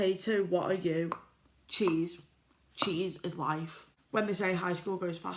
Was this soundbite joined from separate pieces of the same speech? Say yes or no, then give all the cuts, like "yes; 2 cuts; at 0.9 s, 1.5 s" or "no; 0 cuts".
yes; 1 cut; at 3.9 s